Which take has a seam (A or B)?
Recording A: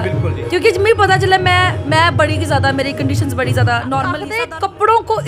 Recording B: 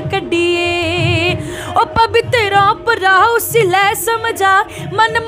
A